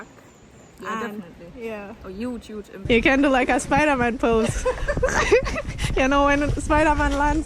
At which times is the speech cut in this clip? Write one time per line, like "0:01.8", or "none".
0:02.8
0:05.8